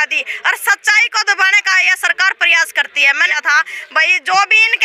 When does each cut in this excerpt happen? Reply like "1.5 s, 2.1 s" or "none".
3.3 s